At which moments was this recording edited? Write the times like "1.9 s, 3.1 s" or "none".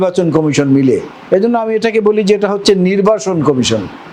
1.1 s